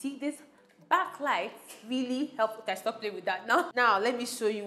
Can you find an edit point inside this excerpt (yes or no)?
yes